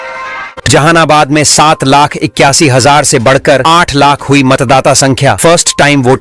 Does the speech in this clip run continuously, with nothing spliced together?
yes; 0 cuts

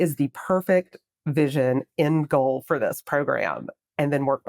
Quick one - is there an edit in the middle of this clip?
no; 0 cuts

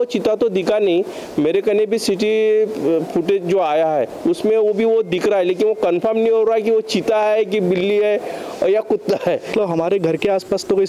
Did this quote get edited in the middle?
yes; 1 cut; at 9.5 s

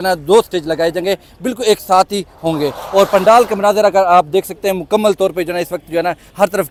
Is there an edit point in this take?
no; 0 cuts

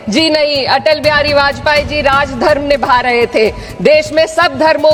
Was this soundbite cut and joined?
no; 0 cuts

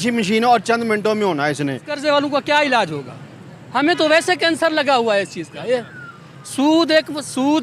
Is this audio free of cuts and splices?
no; 1 cut; at 2.0 s

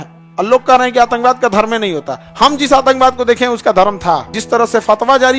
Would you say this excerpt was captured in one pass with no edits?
no; 1 cut; at 4.3 s

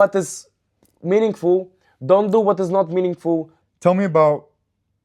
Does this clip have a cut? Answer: yes; 1 cut; at 3.6 s

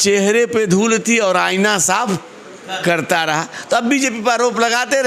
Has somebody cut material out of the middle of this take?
no; 0 cuts

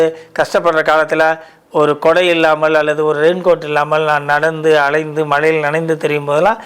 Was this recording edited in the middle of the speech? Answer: no; 0 cuts

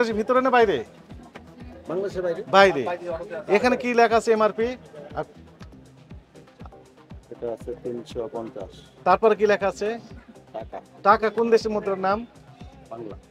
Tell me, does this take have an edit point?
no; 0 cuts

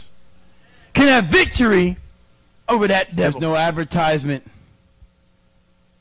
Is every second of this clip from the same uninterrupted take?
no; 1 cut; at 3.3 s

